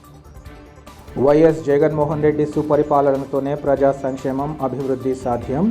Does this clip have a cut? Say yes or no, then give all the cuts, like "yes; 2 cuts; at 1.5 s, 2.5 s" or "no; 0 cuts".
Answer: yes; 1 cut; at 1.0 s